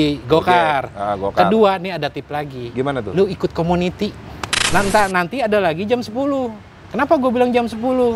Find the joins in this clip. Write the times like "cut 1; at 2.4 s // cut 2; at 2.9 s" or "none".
cut 1; at 4.6 s